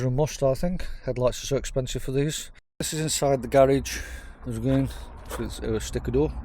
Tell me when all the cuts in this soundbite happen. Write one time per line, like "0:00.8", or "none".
0:02.9